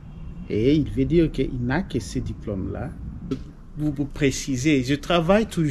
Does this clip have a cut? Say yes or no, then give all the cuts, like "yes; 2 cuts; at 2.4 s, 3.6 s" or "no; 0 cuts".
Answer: yes; 1 cut; at 3.3 s